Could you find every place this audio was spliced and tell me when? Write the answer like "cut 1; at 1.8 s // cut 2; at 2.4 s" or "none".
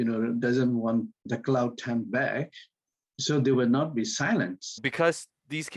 cut 1; at 1.2 s // cut 2; at 4.9 s